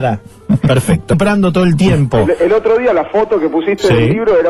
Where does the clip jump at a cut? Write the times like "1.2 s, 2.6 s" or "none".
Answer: none